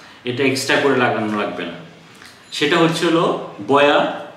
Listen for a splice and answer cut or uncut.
uncut